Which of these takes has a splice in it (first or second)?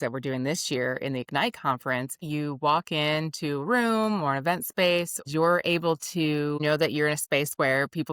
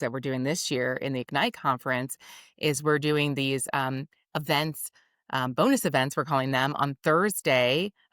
first